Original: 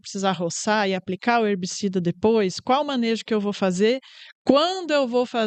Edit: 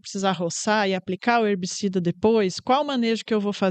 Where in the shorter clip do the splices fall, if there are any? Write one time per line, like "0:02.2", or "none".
none